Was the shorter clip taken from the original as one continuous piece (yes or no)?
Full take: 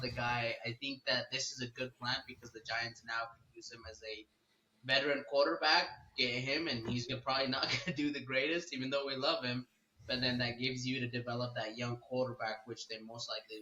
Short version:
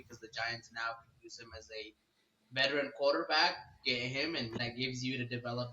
no